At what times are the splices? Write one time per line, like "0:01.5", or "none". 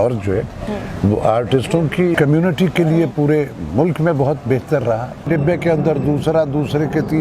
0:02.1
0:05.2